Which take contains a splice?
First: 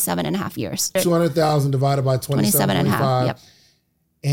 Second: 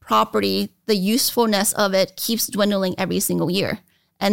first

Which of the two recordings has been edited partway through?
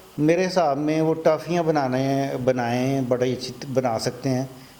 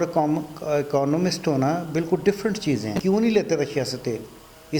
second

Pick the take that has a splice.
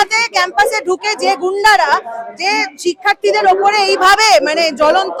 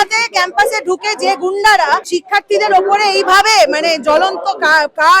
second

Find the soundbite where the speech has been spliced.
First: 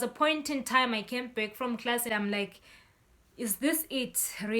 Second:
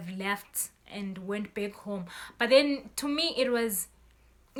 first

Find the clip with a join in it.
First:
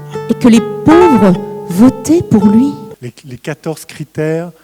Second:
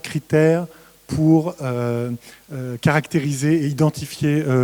first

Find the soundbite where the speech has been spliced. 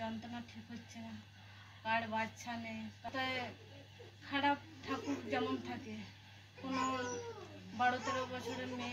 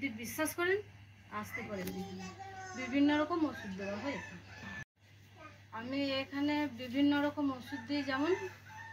first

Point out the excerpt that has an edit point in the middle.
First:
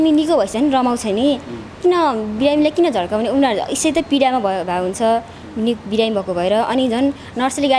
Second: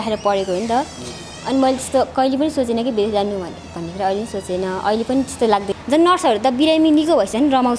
second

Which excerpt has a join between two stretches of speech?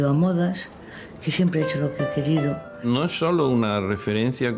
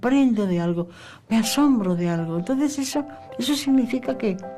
first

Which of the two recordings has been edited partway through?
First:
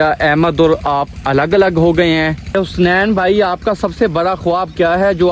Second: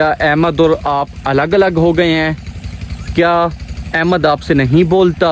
first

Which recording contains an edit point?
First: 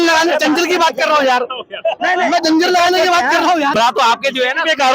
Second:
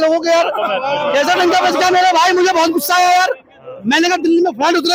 first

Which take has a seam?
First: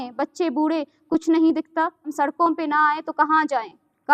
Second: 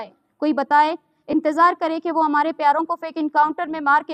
first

